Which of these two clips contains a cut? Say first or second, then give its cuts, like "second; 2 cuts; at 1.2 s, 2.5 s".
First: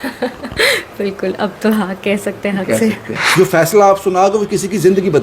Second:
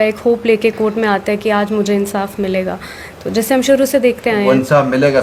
first; 1 cut; at 3.3 s